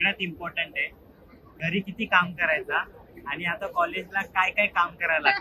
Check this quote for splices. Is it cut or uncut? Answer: cut